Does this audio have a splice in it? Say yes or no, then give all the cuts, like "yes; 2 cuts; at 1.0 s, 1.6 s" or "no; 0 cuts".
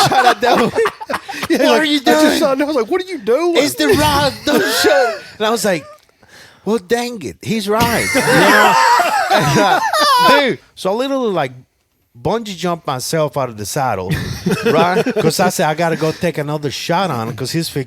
yes; 1 cut; at 10.7 s